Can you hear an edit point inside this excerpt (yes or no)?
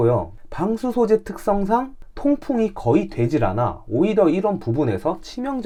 no